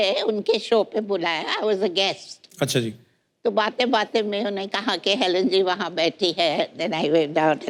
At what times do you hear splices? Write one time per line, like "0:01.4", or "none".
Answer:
none